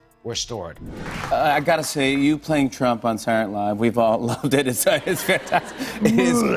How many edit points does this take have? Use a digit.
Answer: 1